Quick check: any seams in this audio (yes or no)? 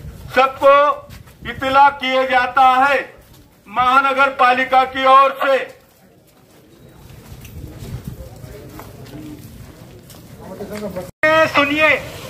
yes